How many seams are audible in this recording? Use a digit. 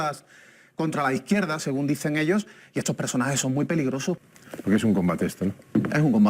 1